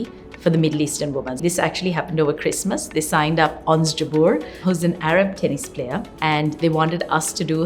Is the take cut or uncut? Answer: cut